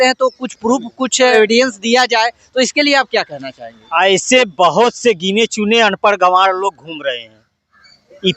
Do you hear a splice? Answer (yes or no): yes